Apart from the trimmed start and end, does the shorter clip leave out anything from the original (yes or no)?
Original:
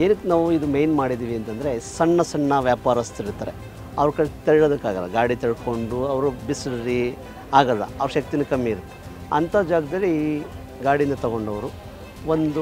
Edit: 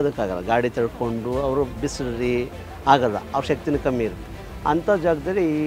no